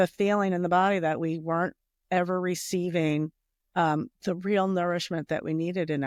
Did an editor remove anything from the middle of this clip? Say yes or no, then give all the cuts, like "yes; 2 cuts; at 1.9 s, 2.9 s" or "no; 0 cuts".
no; 0 cuts